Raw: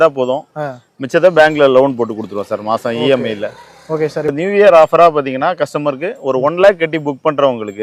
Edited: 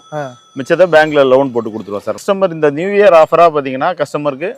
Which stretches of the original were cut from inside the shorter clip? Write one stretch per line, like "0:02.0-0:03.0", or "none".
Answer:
0:02.7-0:03.9